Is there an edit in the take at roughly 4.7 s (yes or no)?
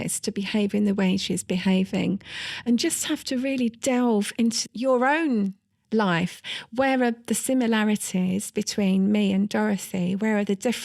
yes